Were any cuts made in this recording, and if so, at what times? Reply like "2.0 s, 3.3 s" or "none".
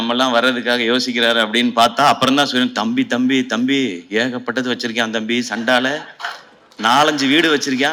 none